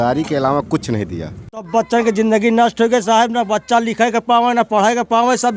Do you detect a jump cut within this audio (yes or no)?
yes